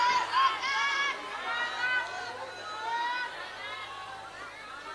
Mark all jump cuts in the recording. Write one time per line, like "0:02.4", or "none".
none